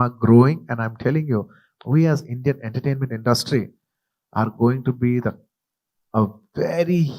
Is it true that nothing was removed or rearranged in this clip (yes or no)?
no